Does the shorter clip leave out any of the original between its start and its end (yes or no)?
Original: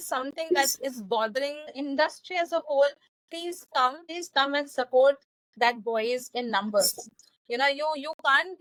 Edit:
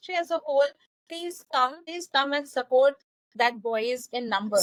no